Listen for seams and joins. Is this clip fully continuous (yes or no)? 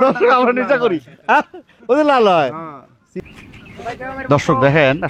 no